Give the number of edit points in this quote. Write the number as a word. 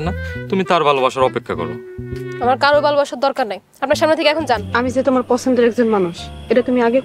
one